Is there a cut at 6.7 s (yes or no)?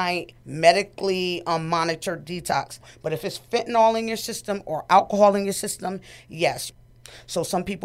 yes